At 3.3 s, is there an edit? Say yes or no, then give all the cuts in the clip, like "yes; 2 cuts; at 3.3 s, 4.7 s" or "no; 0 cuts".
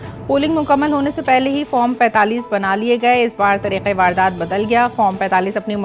no; 0 cuts